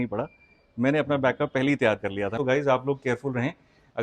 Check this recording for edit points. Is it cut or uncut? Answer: cut